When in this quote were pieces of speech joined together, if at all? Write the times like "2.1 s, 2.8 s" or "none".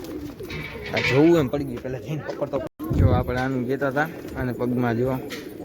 2.7 s